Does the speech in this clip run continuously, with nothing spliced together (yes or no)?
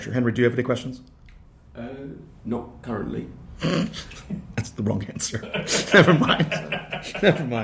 yes